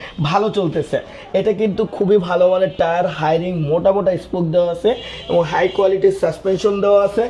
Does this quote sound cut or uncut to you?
uncut